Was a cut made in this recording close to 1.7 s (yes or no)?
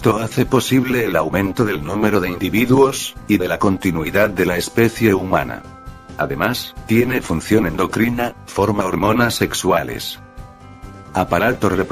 no